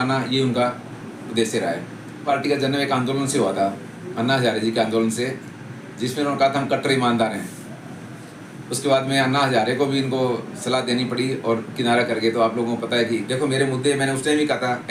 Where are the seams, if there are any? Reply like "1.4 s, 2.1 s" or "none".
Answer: 2.2 s, 13.2 s